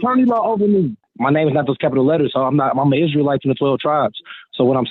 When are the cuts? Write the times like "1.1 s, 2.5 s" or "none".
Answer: 1.0 s